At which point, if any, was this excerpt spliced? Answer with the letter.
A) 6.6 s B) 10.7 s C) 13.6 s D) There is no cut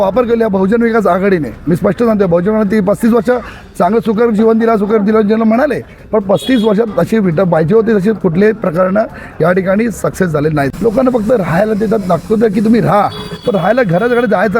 B